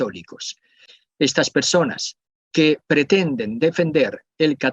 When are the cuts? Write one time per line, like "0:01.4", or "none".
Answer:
0:00.9